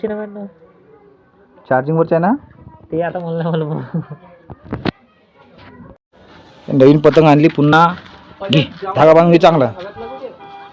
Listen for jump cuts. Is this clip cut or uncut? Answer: cut